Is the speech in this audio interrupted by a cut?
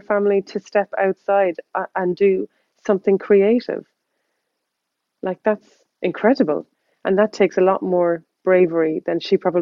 no; 0 cuts

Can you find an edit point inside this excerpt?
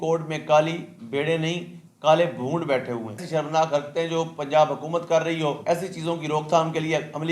yes; 2 cuts; at 3.2 s, 5.6 s

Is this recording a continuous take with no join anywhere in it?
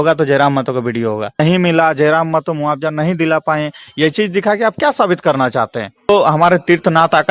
no; 2 cuts; at 1.4 s, 6.1 s

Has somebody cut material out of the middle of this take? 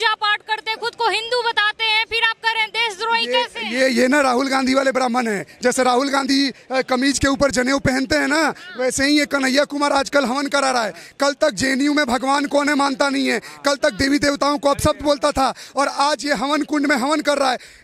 no; 0 cuts

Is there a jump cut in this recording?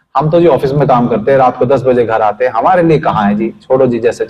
no; 0 cuts

